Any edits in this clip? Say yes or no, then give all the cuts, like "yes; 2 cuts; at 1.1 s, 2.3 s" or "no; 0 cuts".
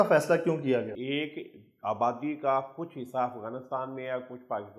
yes; 1 cut; at 1.0 s